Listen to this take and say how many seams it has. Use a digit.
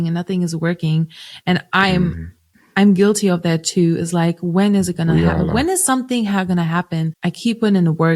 1